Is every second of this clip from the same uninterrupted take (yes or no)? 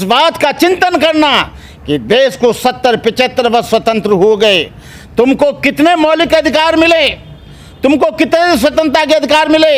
yes